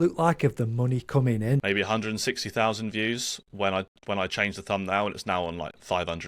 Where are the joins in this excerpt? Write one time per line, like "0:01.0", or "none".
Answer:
0:01.6

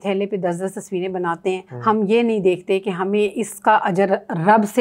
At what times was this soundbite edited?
0:01.7

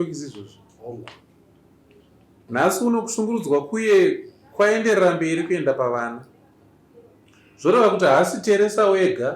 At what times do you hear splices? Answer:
0:02.5

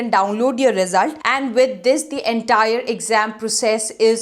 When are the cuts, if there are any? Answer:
0:01.2

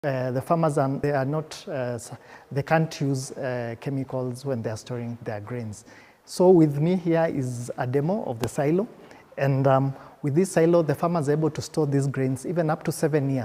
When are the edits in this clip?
0:01.0

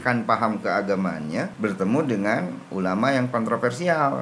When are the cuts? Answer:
0:01.5

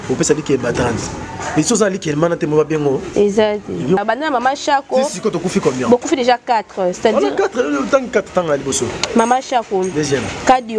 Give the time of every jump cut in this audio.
0:04.0

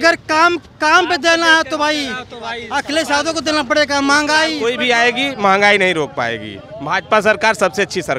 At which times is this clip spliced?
0:04.6

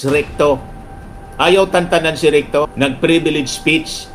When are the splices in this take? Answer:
none

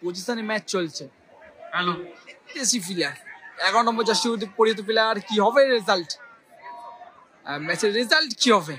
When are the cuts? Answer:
0:02.6

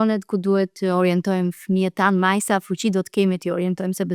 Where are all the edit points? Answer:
none

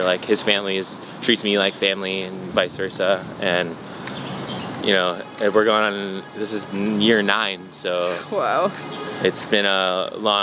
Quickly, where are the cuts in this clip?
none

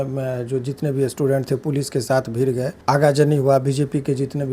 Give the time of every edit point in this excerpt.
0:02.7

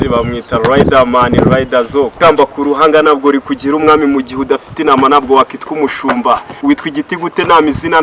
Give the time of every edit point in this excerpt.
0:02.2
0:06.5

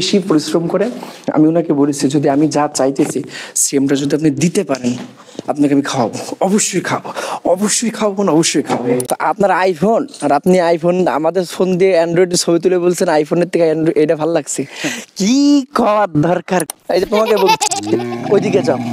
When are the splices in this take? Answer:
0:09.1
0:16.7

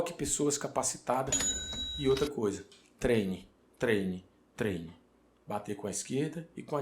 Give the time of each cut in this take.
0:01.6

